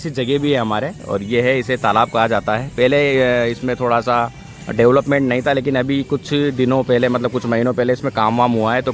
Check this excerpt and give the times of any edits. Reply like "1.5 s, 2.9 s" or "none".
none